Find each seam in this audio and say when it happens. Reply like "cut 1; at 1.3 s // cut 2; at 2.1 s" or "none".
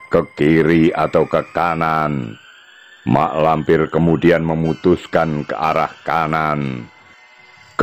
none

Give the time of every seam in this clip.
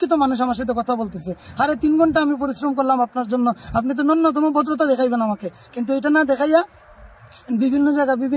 none

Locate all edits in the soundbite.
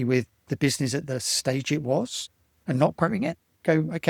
none

